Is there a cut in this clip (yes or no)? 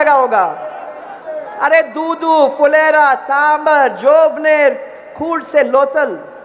no